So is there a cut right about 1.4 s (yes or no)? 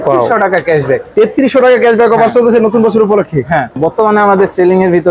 no